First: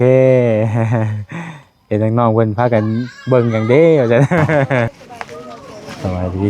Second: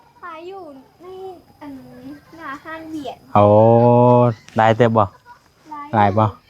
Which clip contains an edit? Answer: first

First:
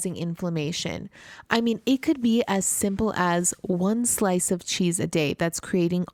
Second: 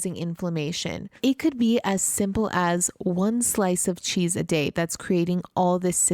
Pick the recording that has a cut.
second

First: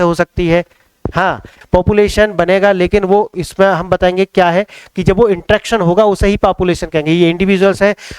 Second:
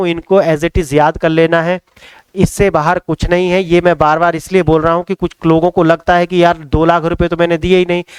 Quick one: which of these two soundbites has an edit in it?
first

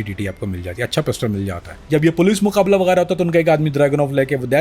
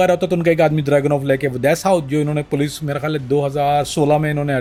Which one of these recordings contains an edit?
first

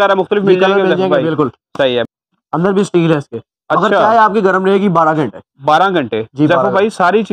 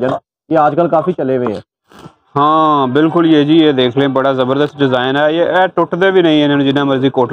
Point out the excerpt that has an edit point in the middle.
first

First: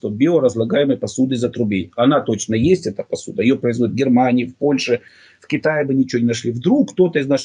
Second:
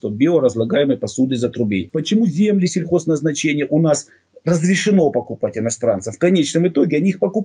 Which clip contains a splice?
second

